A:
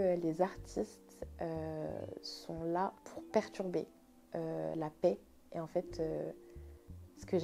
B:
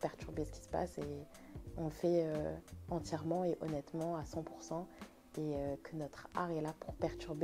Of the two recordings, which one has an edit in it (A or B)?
A